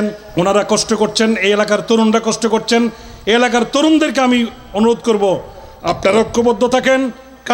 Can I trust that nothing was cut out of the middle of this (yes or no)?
yes